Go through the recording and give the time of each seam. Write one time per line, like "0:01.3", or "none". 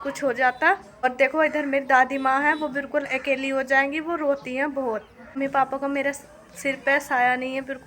0:01.0
0:05.4